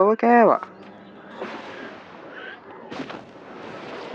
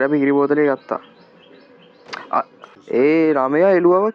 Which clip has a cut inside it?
second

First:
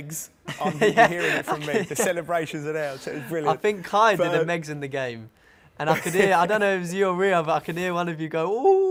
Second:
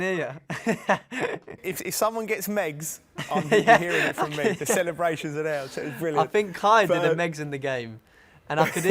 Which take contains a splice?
second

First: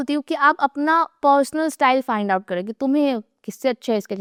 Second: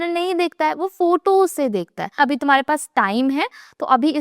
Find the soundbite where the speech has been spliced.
second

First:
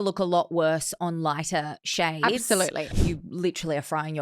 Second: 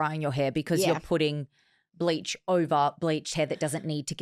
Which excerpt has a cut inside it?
first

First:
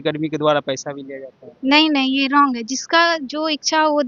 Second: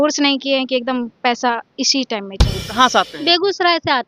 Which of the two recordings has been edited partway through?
second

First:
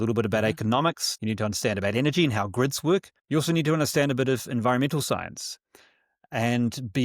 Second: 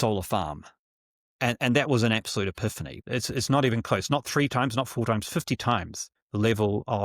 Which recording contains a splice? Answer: second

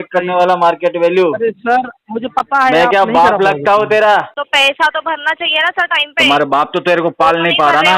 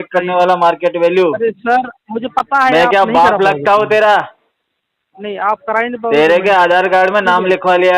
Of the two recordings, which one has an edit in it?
first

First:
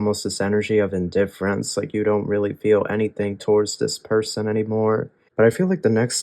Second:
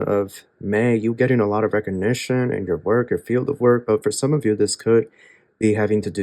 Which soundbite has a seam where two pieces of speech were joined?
first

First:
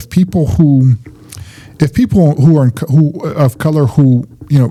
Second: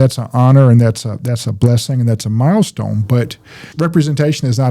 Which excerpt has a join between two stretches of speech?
second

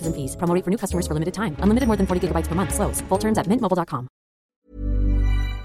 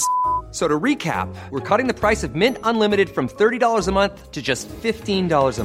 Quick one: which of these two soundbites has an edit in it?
first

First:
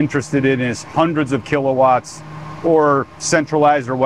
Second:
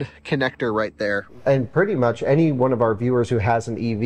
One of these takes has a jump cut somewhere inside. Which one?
second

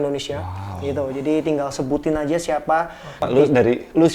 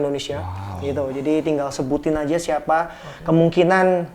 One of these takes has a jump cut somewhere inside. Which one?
first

